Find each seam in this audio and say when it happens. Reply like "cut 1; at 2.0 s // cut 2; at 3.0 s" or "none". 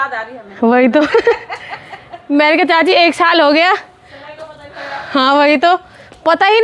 none